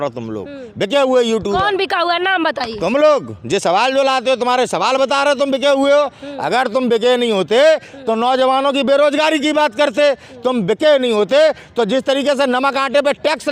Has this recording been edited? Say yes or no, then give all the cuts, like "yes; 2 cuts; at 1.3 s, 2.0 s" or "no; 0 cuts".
no; 0 cuts